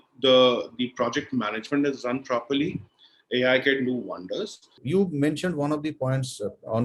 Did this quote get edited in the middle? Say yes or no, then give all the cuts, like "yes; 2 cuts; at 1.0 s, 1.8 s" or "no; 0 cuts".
yes; 1 cut; at 4.7 s